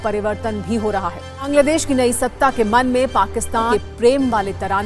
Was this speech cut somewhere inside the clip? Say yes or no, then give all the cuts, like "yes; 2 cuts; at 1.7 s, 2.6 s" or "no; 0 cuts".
yes; 2 cuts; at 1.3 s, 3.7 s